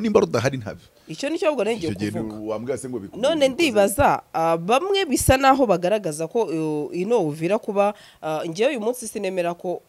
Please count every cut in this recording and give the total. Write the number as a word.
zero